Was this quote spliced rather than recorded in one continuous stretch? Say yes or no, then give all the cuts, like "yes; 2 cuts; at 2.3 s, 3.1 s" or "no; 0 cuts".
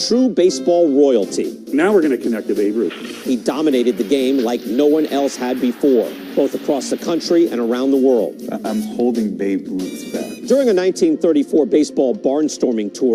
no; 0 cuts